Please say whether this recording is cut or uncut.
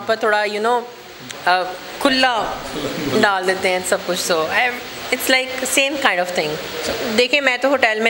cut